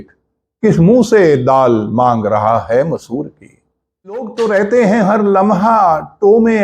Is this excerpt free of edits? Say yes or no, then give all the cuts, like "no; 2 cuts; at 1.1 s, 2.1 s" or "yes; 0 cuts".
no; 1 cut; at 4.3 s